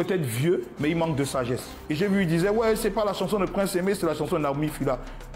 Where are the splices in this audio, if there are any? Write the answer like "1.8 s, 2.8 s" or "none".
1.7 s

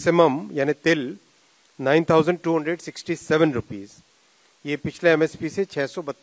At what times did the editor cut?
none

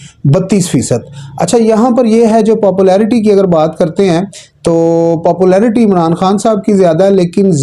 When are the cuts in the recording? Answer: none

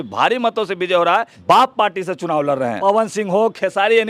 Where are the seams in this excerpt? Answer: 1.3 s, 2.8 s

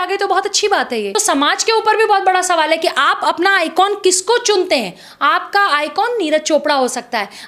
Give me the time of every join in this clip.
1.1 s

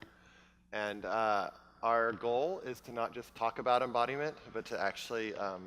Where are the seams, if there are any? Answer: 4.4 s

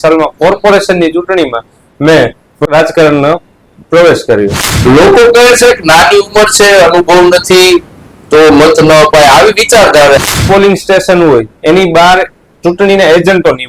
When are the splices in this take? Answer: 2.7 s, 4.6 s, 10.3 s

